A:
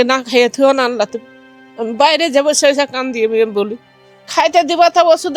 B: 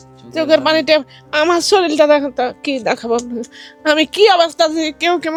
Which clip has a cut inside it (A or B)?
A